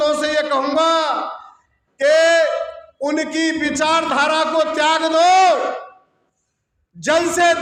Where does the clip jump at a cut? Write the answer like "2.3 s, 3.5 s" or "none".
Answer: none

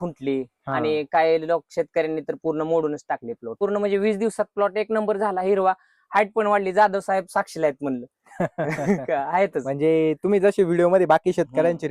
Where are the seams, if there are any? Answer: 3.6 s

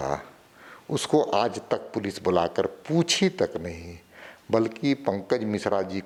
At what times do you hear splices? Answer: none

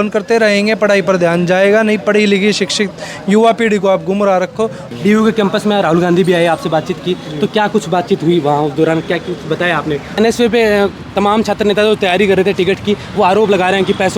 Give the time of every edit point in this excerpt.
4.8 s, 10.2 s

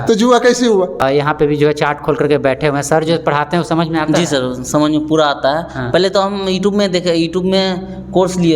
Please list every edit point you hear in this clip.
1.0 s

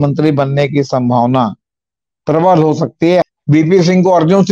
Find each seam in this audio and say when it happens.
3.2 s

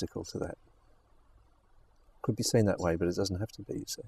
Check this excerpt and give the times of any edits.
none

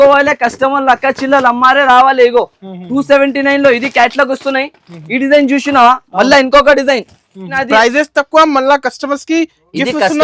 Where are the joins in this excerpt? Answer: 7.5 s

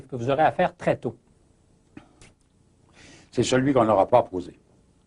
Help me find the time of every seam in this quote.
1.2 s

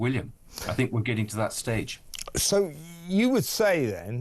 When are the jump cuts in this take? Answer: none

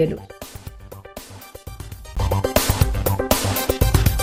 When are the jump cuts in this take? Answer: none

